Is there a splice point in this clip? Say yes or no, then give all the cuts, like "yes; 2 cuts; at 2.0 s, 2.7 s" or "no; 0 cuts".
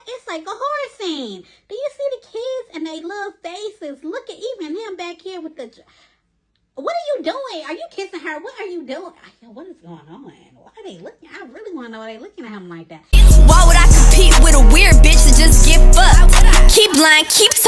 yes; 1 cut; at 13.0 s